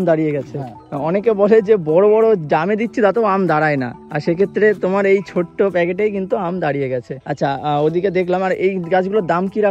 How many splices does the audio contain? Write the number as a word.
zero